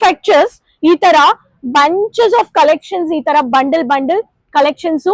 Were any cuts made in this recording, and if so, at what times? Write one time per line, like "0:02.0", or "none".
none